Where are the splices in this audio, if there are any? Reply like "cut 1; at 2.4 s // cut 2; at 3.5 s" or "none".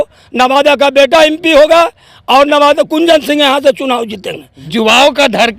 cut 1; at 4.5 s